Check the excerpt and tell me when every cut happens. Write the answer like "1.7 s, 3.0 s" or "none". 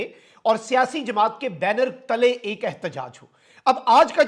none